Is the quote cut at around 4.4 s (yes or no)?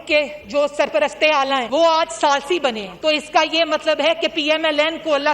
no